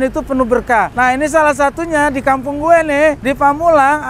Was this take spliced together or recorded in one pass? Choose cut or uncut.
cut